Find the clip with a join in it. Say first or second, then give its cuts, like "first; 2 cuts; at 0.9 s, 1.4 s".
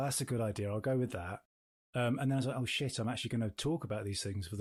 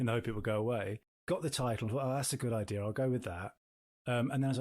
second; 1 cut; at 1.1 s